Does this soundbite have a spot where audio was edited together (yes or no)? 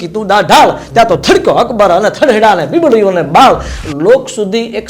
yes